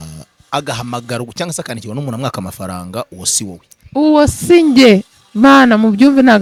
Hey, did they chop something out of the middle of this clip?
no; 0 cuts

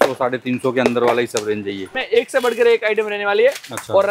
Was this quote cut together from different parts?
yes; 1 cut; at 2.0 s

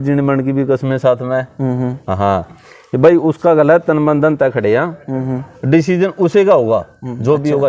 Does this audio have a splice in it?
no; 0 cuts

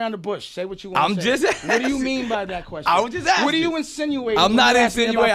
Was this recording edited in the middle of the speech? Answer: no; 0 cuts

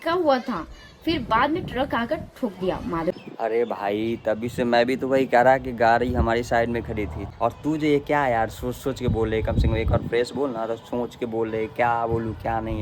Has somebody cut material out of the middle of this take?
yes; 2 cuts; at 3.2 s, 7.2 s

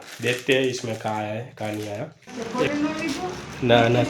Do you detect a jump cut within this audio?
yes; 1 cut; at 2.2 s

